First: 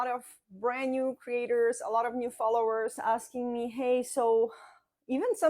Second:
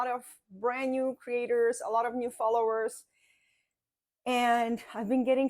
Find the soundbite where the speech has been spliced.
first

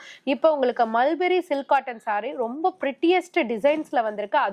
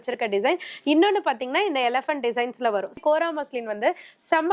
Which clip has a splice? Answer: second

